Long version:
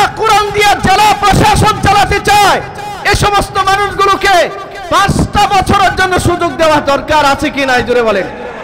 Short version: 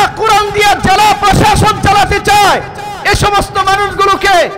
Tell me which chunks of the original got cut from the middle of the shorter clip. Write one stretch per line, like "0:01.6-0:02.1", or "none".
none